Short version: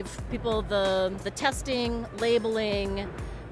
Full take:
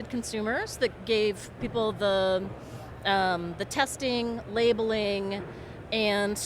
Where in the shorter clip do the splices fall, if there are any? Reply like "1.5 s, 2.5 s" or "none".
1.3 s